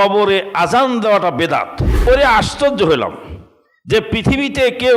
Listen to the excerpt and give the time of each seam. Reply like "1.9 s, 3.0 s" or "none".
1.9 s